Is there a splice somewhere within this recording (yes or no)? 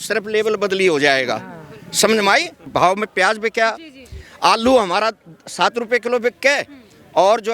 yes